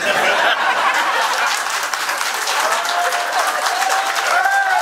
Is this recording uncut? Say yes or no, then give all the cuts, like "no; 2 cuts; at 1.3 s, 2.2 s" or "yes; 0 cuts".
yes; 0 cuts